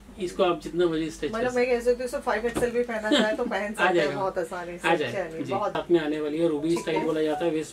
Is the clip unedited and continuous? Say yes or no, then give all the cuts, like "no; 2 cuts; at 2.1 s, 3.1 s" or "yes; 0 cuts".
no; 1 cut; at 5.7 s